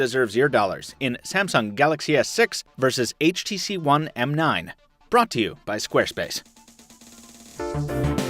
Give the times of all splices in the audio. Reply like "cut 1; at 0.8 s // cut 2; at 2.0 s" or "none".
cut 1; at 3.8 s